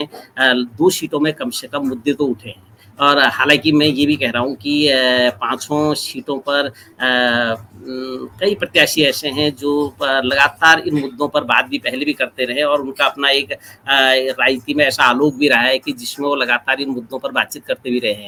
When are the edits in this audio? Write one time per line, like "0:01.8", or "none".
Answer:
none